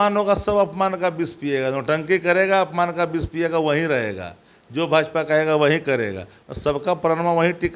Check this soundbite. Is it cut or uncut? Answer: uncut